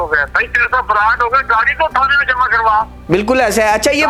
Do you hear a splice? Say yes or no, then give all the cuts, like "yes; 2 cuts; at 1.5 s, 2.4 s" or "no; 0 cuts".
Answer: no; 0 cuts